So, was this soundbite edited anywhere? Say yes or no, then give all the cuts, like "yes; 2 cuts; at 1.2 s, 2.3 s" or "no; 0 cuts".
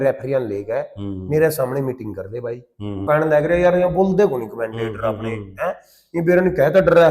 yes; 1 cut; at 3.0 s